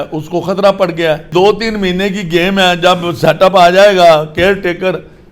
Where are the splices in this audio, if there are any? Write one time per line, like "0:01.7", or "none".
0:01.3